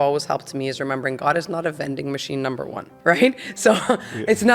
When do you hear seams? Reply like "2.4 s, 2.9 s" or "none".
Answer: 2.9 s